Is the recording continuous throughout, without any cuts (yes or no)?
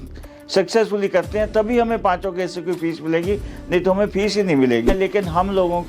no